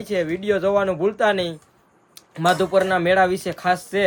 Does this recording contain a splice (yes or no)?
no